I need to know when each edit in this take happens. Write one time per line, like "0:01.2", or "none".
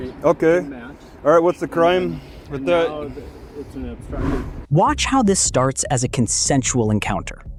none